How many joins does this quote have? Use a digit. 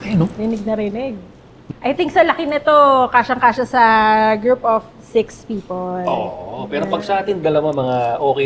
1